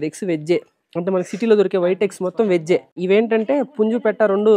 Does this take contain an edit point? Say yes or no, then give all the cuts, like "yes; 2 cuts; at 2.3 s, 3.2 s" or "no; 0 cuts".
yes; 1 cut; at 2.9 s